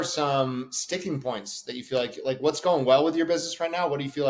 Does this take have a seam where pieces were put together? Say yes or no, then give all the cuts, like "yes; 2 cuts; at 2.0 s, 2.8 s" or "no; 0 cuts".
no; 0 cuts